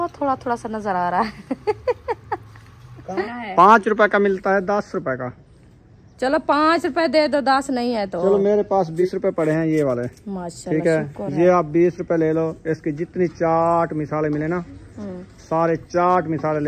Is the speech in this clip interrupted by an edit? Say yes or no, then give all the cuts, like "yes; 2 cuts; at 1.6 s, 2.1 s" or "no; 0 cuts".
yes; 2 cuts; at 3.3 s, 9.0 s